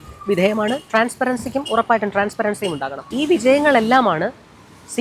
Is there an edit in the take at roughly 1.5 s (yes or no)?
no